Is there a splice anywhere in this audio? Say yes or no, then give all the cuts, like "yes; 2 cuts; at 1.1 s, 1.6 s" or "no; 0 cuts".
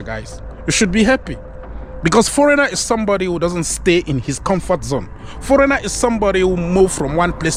no; 0 cuts